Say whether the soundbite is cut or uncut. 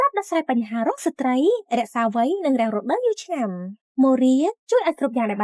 uncut